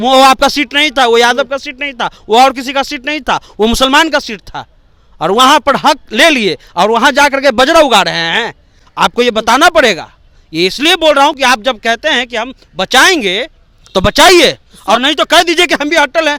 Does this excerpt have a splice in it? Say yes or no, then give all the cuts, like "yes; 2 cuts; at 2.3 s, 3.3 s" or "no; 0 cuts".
no; 0 cuts